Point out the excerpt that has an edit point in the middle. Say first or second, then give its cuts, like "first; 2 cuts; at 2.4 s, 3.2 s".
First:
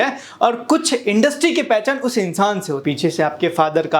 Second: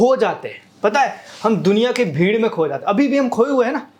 first; 1 cut; at 2.8 s